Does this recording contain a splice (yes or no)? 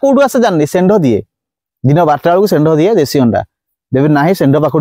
yes